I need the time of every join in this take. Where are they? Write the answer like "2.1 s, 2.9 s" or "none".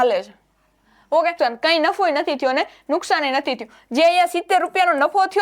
1.3 s

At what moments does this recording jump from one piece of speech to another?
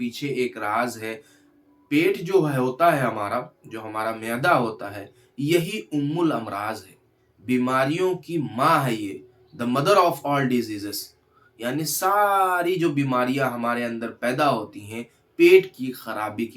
none

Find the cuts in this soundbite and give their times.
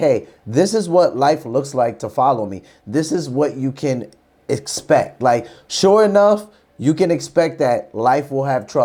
none

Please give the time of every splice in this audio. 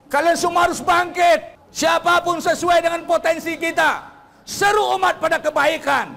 1.6 s

